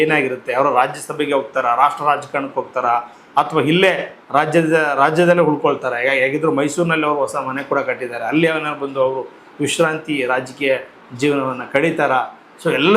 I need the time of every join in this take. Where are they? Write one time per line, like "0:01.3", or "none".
none